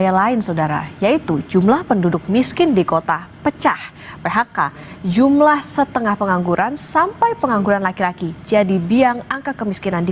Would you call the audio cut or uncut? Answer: uncut